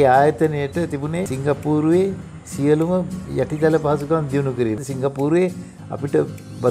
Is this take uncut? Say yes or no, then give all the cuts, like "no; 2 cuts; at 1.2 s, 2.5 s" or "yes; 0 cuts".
no; 2 cuts; at 1.3 s, 4.8 s